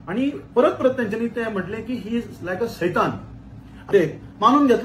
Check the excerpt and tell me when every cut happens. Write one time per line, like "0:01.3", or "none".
0:03.9